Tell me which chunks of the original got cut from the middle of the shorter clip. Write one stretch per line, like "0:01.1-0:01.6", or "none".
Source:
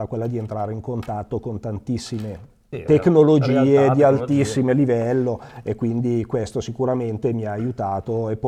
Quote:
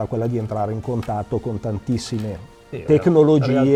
none